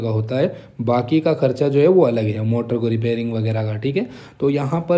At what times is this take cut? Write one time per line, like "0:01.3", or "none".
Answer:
none